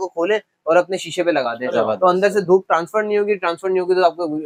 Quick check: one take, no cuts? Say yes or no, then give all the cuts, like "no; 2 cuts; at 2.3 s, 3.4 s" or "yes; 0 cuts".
yes; 0 cuts